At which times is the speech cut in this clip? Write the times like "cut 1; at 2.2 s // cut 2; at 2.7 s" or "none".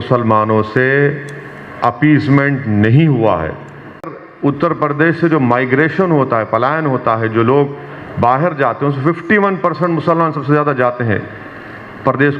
cut 1; at 4.2 s